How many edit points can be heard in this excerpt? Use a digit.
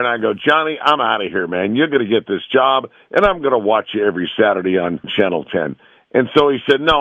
1